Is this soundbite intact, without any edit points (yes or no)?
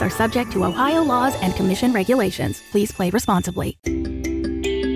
no